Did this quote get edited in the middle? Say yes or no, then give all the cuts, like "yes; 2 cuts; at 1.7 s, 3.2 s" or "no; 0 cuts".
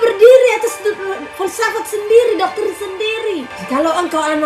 yes; 1 cut; at 3.5 s